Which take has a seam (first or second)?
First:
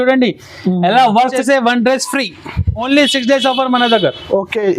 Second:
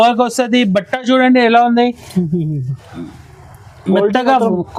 first